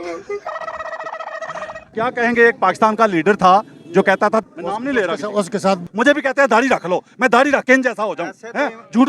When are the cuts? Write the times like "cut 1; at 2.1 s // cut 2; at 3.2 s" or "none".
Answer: cut 1; at 1.9 s // cut 2; at 4.4 s // cut 3; at 5.8 s